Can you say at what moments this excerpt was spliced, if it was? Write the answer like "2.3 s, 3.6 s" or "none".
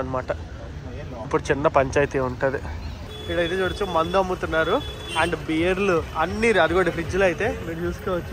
3.1 s